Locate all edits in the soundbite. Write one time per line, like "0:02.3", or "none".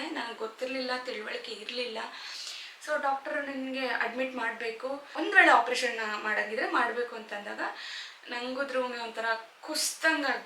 0:02.4